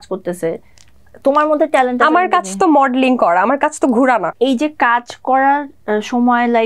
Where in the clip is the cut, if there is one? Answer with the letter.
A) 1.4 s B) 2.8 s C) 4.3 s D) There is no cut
C